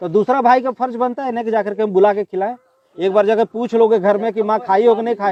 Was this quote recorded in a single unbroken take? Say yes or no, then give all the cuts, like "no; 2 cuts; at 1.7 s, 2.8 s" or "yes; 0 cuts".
yes; 0 cuts